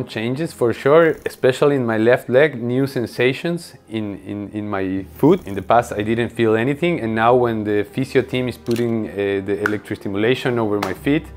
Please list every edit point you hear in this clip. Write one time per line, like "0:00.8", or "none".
0:01.3
0:05.5